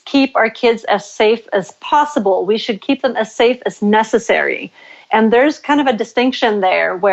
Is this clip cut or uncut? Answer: uncut